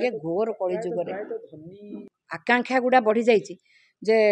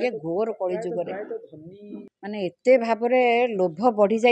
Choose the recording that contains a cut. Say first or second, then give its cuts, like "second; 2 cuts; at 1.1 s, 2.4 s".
first; 1 cut; at 2.1 s